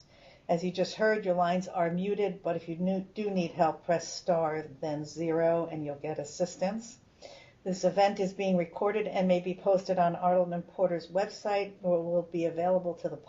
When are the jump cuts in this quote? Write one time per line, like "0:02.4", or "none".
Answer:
0:07.2